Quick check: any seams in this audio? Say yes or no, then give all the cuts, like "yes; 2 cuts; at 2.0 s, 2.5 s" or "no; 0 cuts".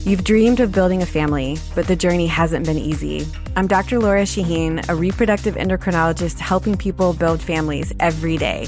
no; 0 cuts